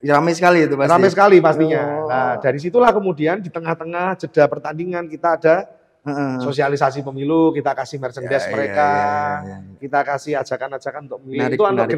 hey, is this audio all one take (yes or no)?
yes